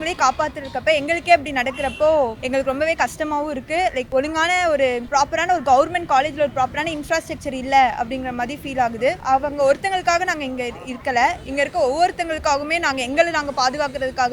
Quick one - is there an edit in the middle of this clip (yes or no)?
yes